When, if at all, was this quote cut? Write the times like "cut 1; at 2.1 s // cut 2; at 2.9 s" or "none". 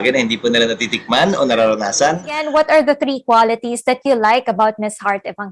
cut 1; at 2.4 s